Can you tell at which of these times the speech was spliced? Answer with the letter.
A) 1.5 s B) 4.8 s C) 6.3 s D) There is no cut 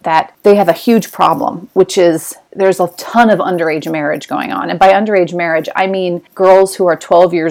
D